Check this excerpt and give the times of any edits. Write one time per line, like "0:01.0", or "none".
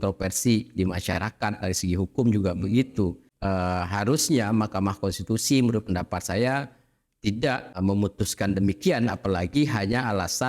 0:03.3
0:07.8